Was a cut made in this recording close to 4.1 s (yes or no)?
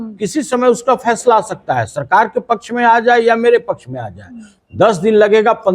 no